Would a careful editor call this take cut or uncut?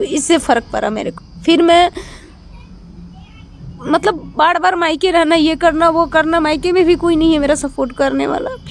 uncut